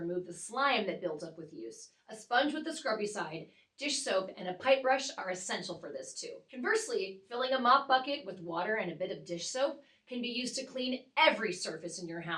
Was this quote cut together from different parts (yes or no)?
yes